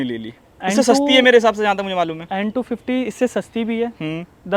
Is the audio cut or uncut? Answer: uncut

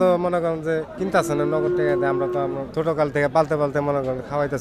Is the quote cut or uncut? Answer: cut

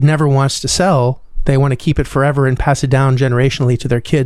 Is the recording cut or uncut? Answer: cut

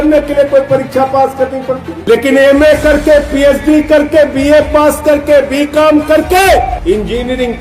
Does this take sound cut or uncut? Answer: cut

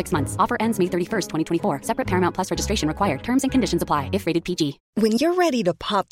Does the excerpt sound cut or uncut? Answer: cut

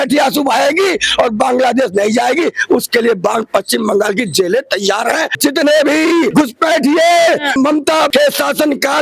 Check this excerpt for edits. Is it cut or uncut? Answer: cut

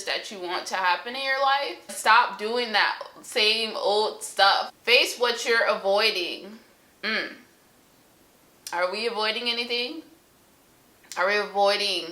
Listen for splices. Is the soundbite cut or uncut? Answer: cut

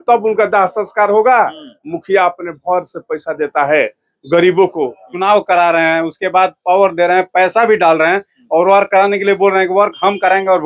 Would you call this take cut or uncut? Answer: cut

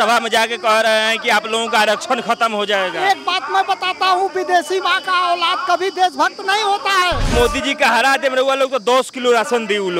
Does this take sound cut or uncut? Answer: cut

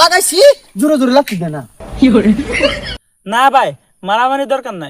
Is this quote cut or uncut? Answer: cut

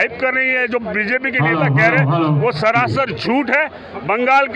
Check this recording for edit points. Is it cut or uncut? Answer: uncut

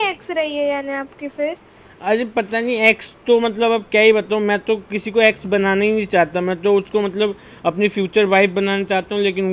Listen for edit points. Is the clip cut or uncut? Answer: uncut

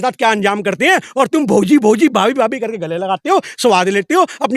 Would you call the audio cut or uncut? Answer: uncut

